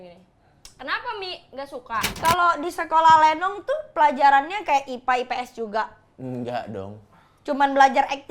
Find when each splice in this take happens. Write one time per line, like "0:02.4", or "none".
0:02.2